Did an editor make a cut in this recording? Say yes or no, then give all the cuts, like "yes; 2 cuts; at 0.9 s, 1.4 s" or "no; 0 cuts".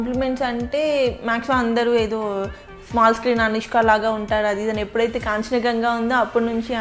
no; 0 cuts